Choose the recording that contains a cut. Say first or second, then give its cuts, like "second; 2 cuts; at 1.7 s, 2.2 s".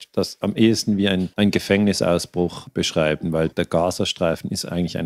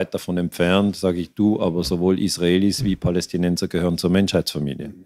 first; 3 cuts; at 1.3 s, 2.6 s, 3.5 s